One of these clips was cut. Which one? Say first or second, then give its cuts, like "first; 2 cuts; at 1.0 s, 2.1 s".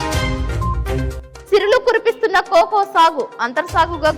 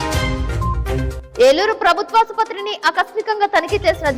first; 1 cut; at 1.2 s